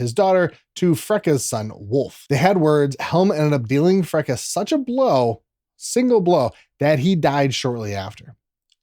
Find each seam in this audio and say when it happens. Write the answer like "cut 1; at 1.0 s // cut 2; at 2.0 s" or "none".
cut 1; at 2.2 s